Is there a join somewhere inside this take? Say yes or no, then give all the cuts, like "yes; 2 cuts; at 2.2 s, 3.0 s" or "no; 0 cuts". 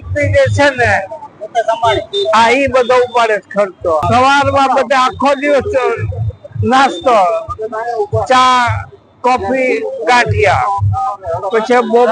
yes; 1 cut; at 4.0 s